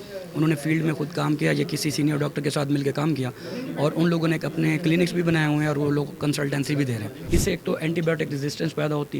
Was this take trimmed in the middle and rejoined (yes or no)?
yes